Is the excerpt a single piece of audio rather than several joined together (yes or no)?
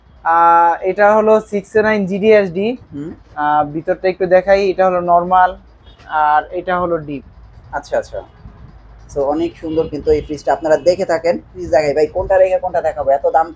no